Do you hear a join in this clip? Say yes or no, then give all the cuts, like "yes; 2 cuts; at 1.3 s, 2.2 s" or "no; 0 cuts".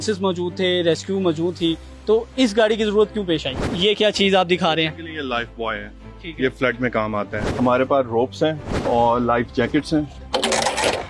yes; 4 cuts; at 3.7 s, 7.4 s, 8.8 s, 10.2 s